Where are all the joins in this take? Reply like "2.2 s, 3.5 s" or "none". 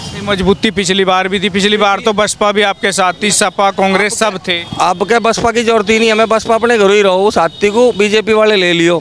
none